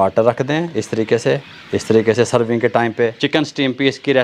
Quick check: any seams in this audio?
yes; 2 cuts; at 1.5 s, 3.2 s

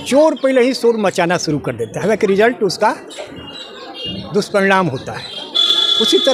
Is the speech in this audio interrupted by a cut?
no; 0 cuts

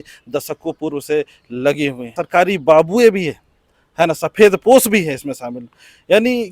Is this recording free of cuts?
no; 1 cut; at 2.2 s

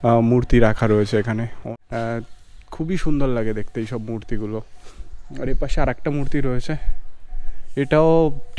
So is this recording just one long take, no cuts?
no; 1 cut; at 1.5 s

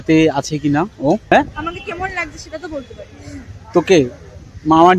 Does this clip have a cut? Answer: yes; 1 cut; at 1.3 s

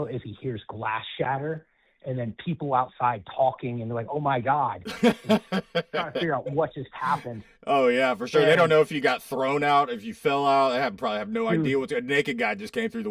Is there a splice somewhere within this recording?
no; 0 cuts

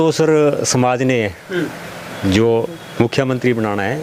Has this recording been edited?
no; 0 cuts

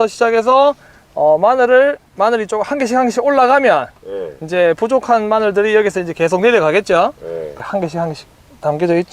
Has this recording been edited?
yes; 1 cut; at 7.5 s

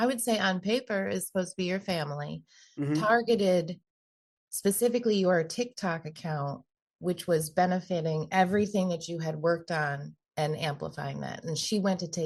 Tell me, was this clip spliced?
no; 0 cuts

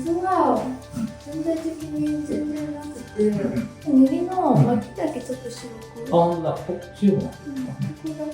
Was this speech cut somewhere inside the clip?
yes; 1 cut; at 3.7 s

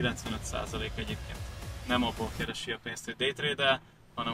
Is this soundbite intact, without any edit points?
yes; 0 cuts

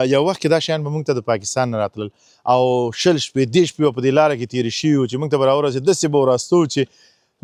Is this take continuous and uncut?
yes; 0 cuts

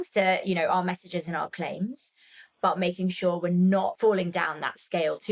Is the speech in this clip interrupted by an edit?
yes; 1 cut; at 3.9 s

